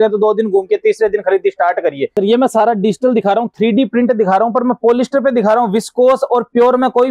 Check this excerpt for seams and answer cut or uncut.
cut